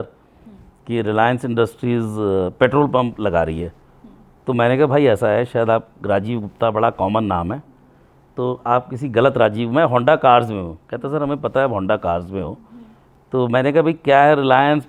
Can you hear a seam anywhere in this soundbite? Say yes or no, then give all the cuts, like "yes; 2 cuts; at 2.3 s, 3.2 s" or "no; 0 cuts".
no; 0 cuts